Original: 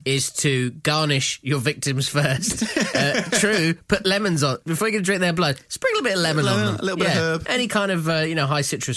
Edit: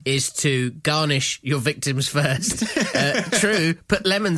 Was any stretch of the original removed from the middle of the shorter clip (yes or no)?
no